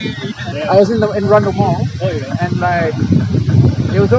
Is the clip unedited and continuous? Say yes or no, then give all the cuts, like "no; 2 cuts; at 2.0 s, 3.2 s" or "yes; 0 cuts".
yes; 0 cuts